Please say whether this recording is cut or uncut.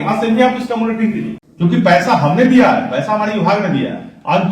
cut